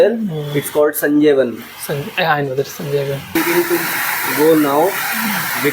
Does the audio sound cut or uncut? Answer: cut